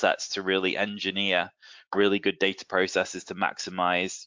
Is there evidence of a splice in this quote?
no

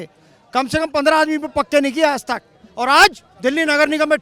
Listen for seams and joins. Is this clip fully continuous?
yes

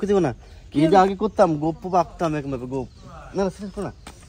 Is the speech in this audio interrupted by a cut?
no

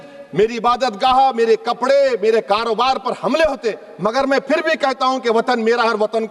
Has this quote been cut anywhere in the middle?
no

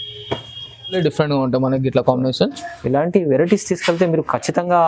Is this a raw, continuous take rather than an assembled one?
no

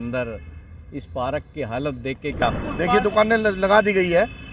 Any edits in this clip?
yes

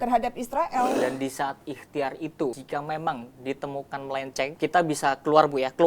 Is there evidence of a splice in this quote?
yes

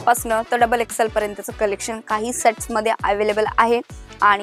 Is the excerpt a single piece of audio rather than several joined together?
yes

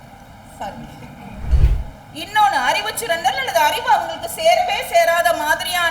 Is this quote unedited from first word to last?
no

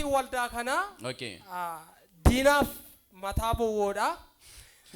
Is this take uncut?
yes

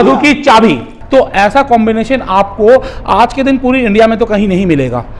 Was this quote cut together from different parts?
yes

